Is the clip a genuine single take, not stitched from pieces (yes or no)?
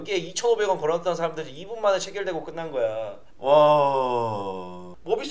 yes